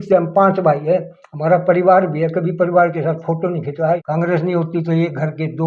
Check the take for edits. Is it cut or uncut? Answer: cut